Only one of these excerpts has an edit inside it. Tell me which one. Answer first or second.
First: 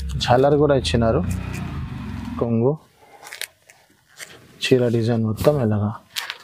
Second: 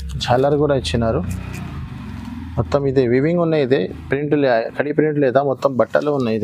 first